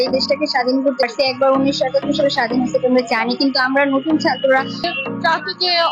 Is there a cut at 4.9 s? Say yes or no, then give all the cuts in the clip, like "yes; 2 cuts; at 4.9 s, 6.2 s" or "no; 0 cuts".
yes; 2 cuts; at 1.1 s, 4.9 s